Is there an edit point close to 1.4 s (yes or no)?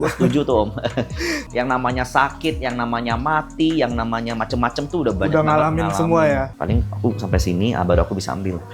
yes